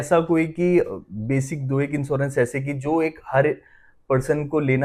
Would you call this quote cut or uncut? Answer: uncut